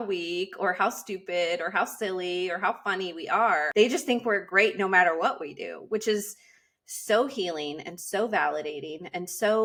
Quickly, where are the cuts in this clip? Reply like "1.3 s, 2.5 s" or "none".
none